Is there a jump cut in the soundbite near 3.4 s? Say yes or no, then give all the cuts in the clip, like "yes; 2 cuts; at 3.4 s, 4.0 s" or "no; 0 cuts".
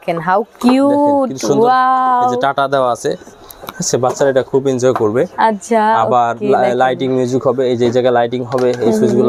no; 0 cuts